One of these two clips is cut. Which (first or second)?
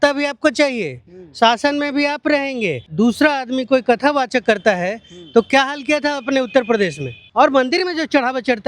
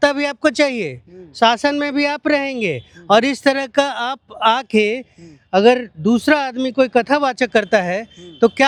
first